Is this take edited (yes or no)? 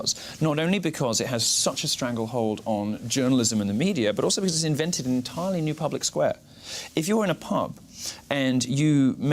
no